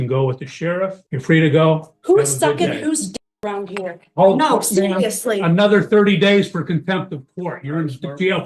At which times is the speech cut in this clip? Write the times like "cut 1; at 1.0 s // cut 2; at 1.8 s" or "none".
cut 1; at 1.1 s